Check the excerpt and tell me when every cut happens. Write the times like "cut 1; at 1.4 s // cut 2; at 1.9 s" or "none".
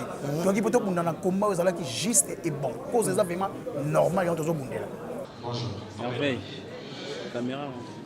cut 1; at 5.3 s